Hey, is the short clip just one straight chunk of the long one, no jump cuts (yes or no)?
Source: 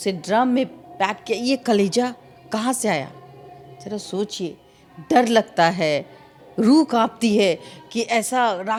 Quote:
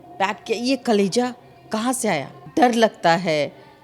no